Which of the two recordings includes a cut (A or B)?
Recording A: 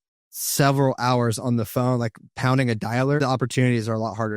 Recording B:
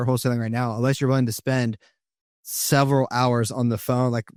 A